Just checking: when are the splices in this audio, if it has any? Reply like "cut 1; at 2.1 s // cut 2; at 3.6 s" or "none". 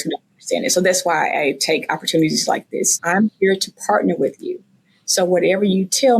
cut 1; at 3.0 s